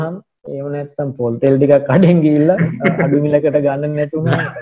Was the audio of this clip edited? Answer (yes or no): no